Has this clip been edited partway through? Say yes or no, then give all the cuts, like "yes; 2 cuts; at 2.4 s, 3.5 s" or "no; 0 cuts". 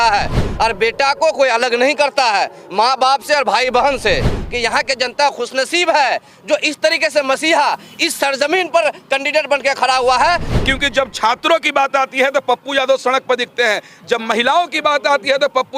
yes; 2 cuts; at 4.4 s, 10.4 s